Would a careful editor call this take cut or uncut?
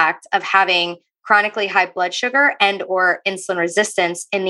uncut